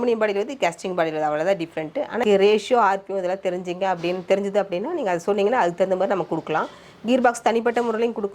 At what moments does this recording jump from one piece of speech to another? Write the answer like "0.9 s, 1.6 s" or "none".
2.2 s